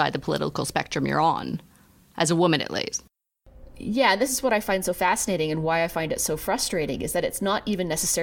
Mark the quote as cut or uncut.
uncut